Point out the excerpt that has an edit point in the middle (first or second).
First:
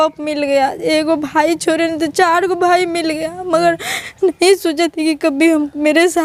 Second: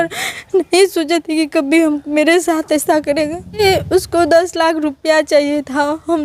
second